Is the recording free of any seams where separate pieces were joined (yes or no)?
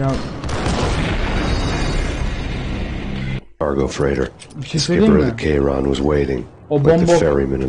yes